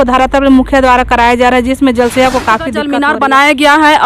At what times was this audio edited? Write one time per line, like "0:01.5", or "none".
0:02.9